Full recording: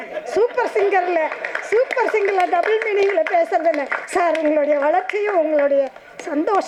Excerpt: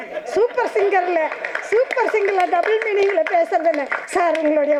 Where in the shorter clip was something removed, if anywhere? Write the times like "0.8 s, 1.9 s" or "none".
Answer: none